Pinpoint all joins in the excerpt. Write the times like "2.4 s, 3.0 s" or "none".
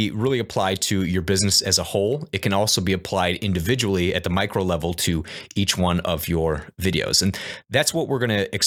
none